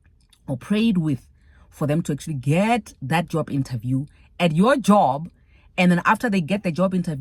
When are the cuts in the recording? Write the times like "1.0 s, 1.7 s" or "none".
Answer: none